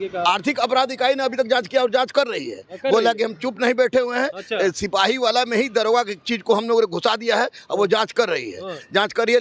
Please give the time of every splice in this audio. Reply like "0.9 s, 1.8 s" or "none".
none